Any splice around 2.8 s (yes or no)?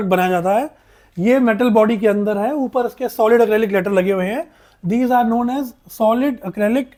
no